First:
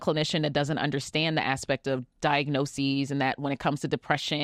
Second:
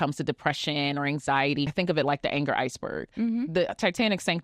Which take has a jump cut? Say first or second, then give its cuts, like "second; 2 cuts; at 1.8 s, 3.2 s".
second; 1 cut; at 1.7 s